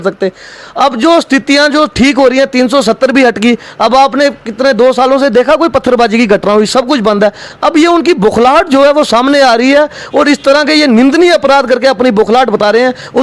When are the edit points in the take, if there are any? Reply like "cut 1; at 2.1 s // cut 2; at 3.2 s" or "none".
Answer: none